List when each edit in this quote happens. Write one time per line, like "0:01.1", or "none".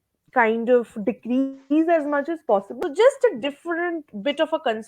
0:02.7

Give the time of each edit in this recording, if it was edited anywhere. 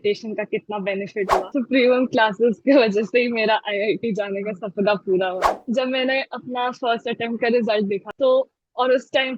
0:01.5
0:05.6
0:08.1

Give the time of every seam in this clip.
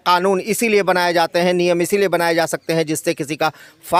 none

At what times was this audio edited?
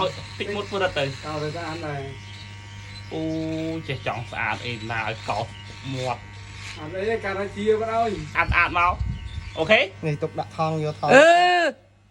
0:08.3

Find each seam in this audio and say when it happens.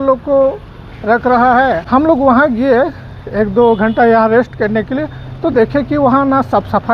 0:01.8

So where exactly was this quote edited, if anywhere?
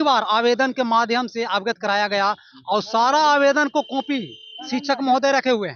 none

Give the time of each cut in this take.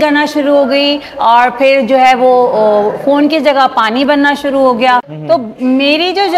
0:05.1

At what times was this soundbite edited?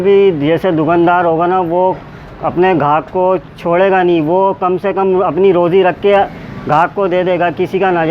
none

